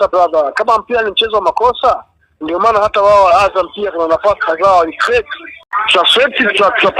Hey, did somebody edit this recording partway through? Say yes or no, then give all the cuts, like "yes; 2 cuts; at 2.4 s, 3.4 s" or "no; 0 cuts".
yes; 1 cut; at 5.7 s